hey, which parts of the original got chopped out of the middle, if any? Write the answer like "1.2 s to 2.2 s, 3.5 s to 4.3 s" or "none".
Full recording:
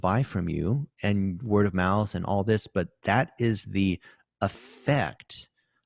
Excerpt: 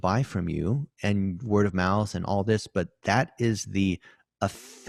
none